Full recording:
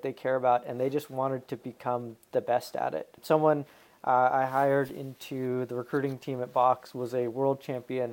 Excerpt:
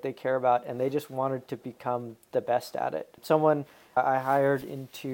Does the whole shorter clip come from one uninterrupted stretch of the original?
no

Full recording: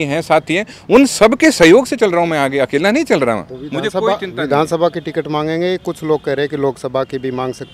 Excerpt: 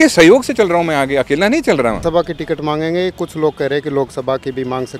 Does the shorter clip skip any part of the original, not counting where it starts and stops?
yes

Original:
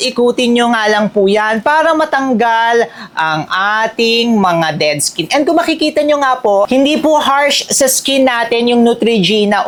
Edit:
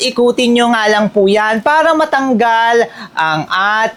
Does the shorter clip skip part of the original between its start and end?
no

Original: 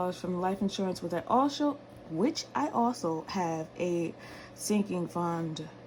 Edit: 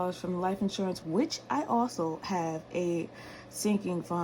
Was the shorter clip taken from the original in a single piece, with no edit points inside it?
no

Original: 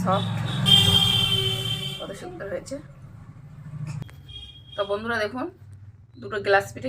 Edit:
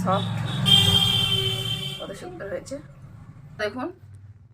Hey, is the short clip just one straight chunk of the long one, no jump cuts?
no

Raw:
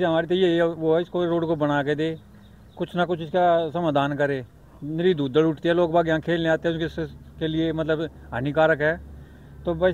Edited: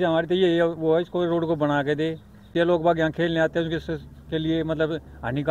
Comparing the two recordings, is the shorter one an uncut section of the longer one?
no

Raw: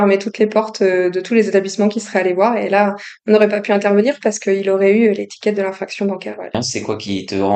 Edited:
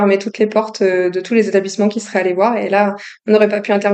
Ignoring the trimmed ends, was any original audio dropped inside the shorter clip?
no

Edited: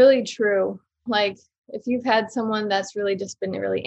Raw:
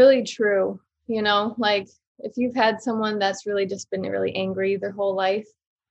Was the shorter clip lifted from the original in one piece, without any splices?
no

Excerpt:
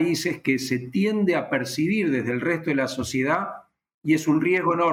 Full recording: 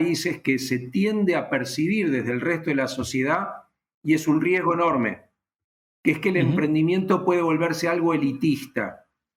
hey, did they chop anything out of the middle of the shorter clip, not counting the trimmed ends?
no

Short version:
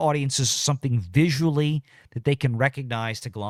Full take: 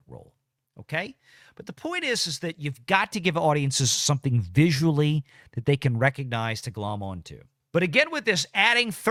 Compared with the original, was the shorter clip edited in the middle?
no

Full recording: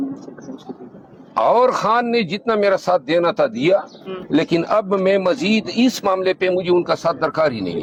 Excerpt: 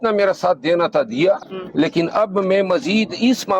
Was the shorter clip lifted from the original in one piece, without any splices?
no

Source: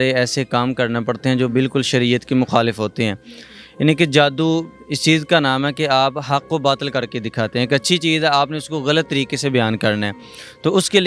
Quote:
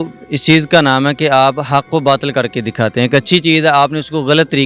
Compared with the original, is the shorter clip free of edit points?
yes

